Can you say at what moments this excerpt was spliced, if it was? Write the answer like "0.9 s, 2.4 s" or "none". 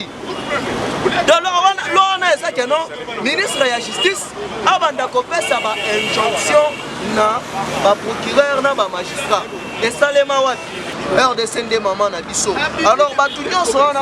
10.9 s